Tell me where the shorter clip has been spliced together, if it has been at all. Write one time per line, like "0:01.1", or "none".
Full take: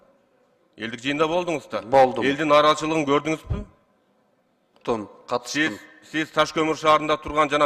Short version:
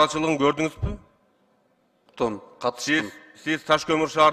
none

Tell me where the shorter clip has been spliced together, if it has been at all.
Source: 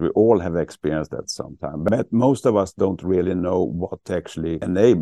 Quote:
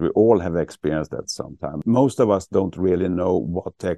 0:01.8

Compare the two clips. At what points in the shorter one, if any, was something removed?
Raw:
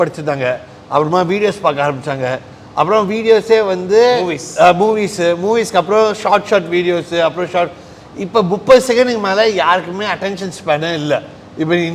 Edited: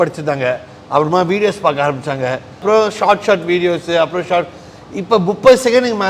0:02.6

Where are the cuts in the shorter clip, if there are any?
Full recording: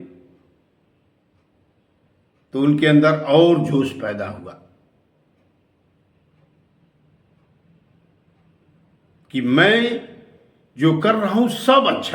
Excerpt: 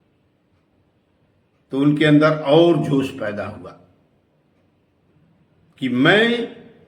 0:05.1

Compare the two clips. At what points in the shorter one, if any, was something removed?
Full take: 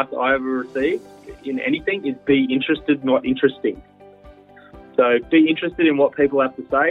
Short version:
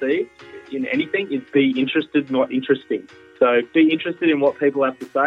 0:03.2

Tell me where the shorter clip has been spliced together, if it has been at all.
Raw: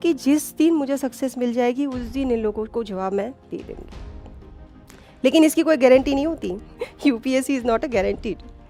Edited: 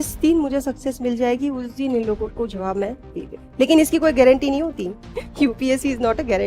0:03.4

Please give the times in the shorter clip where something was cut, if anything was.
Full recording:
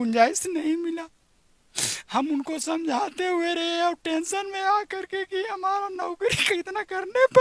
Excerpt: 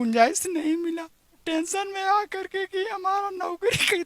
0:01.4

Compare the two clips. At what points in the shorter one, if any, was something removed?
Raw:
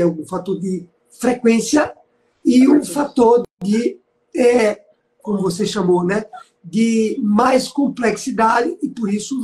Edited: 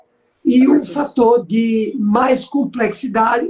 0:01.5

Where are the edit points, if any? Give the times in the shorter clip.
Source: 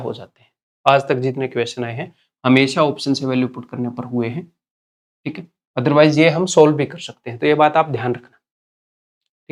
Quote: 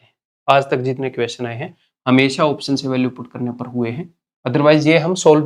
0:04.2

